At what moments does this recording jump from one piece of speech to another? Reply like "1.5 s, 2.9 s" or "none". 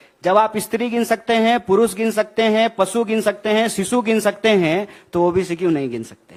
none

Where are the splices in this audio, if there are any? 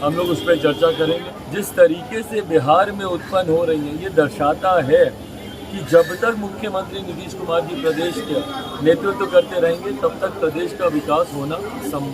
1.3 s

